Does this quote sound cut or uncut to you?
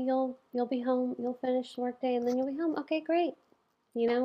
uncut